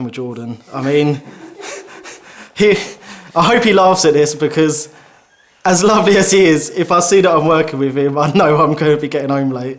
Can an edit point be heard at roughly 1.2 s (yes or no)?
no